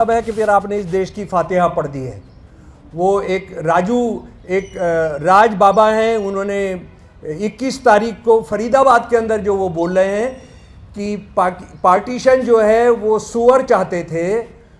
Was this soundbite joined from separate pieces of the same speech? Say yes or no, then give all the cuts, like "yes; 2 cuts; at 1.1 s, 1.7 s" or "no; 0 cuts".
no; 0 cuts